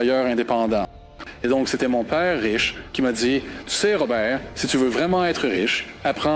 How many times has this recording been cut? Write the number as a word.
one